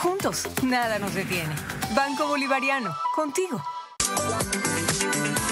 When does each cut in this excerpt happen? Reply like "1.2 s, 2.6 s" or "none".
3.9 s